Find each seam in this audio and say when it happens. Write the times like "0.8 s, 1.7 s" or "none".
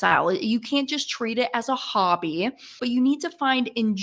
2.7 s